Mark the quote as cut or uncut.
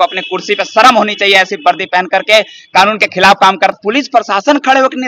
cut